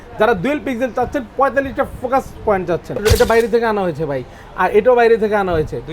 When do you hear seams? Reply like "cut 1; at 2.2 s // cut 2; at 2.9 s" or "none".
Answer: cut 1; at 3.0 s